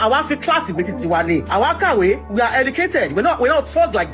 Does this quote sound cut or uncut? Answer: cut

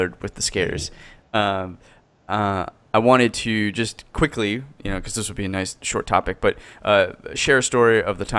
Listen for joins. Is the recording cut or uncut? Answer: cut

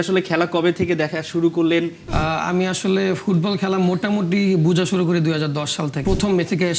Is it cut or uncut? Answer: cut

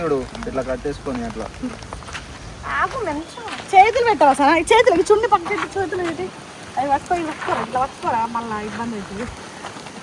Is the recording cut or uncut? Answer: cut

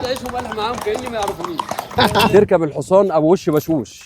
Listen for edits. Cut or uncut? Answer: cut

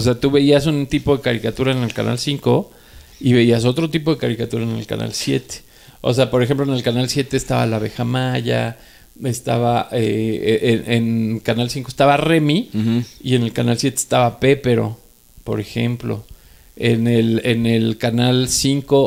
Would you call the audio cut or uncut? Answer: uncut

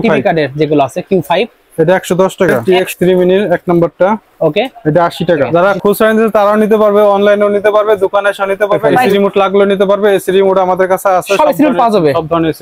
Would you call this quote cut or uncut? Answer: cut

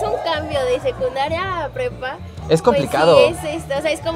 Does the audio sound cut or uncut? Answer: uncut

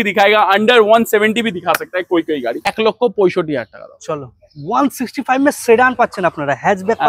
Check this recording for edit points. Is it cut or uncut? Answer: cut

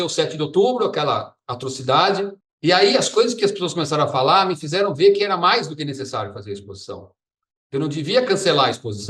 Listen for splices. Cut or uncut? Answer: cut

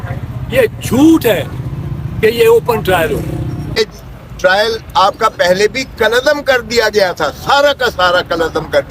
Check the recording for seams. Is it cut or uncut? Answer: cut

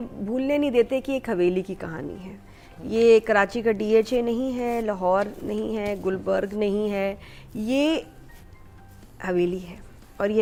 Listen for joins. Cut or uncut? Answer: uncut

